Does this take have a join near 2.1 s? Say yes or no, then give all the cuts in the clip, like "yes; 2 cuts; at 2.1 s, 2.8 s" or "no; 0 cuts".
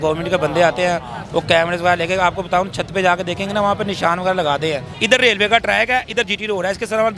no; 1 cut; at 4.9 s